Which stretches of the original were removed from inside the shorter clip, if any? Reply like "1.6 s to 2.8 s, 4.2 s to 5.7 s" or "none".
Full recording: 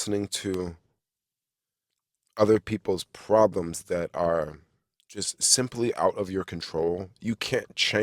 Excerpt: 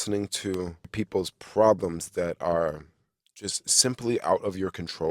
0.9 s to 2.7 s

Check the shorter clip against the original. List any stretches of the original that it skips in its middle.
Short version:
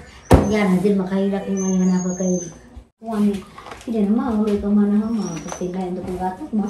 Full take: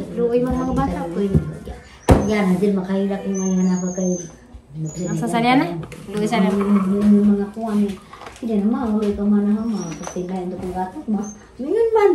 4.8 s to 7.6 s

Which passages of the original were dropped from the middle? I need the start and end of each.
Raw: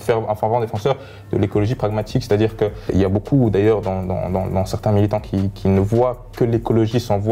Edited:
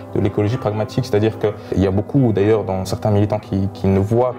4.1 s to 4.7 s

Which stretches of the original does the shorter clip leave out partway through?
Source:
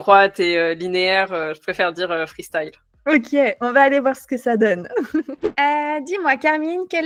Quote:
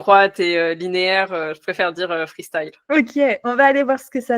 2.8 s to 2.9 s

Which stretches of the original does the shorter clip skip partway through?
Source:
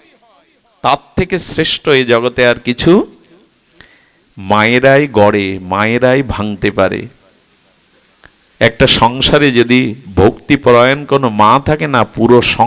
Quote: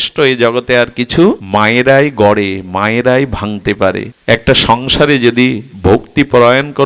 3.1 s to 4.4 s, 7.1 s to 8.4 s

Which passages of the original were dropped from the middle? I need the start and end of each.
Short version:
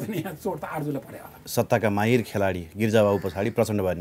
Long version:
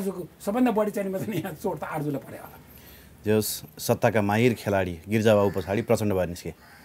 2.5 s to 3.7 s

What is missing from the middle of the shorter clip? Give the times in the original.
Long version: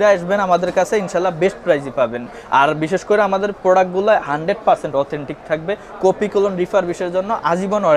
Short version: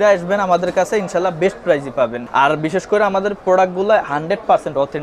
2.2 s to 2.4 s

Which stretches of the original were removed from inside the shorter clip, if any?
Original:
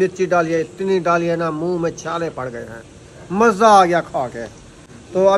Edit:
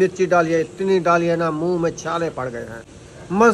none

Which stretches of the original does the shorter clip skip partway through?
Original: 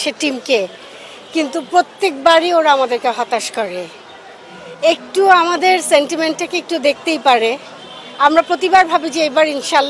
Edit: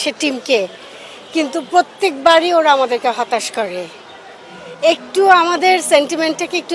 none

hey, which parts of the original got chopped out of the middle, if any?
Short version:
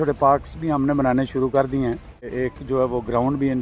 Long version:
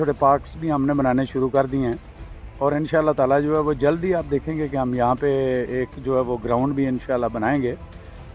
2.3 s to 5.7 s

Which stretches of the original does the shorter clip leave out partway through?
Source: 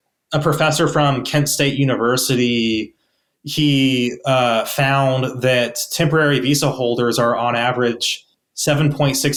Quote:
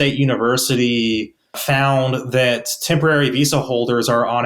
3.2 s to 4.7 s

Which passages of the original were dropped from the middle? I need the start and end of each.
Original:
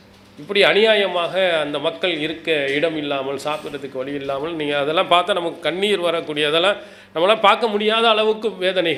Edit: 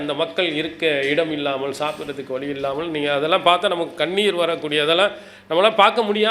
none

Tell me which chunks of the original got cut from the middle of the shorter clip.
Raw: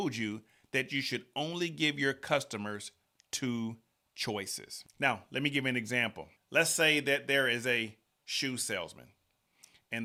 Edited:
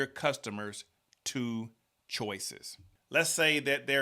4.9 s to 6.2 s

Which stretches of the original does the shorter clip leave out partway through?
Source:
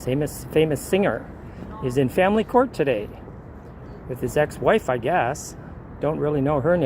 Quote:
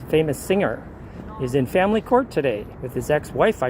3.2 s to 4.0 s

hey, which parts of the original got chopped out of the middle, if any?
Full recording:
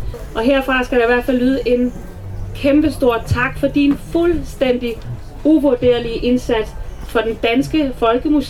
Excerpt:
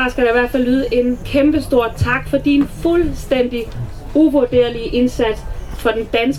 2.0 s to 2.5 s

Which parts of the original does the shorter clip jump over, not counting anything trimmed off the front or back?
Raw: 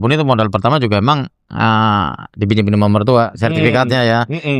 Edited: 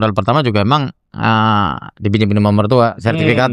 none

